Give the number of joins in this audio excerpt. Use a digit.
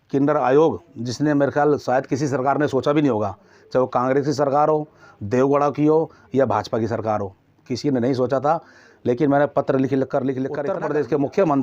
1